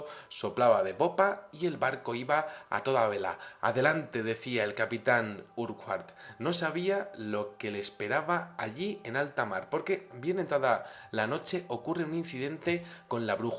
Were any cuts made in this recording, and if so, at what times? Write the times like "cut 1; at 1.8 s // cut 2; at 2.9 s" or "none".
none